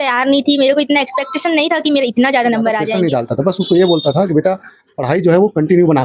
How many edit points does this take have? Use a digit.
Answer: 1